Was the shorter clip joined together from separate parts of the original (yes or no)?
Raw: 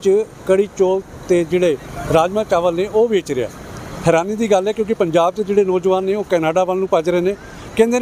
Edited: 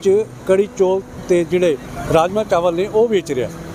no